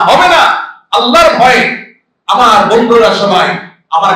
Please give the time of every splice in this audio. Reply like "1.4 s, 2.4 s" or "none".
none